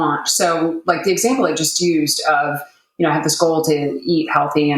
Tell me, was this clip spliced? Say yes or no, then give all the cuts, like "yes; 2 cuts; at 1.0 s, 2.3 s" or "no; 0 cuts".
no; 0 cuts